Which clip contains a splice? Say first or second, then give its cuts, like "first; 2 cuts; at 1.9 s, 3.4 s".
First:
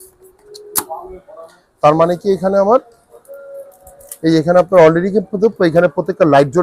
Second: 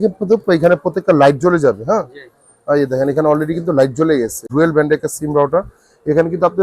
second; 1 cut; at 4.5 s